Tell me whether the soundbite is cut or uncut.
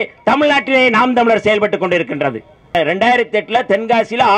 cut